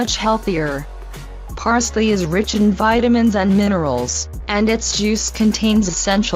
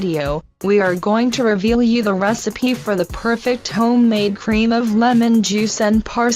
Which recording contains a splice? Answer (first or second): second